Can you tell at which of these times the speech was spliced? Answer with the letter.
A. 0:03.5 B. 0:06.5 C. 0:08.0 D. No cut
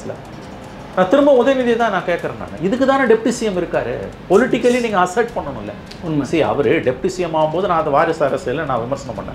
D